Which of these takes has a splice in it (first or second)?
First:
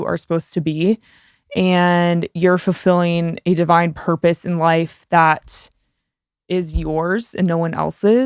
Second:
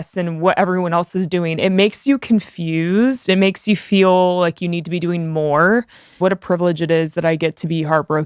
second